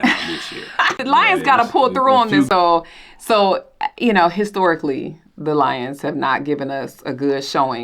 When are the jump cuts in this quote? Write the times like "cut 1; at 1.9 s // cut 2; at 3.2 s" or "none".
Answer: cut 1; at 1.0 s // cut 2; at 2.5 s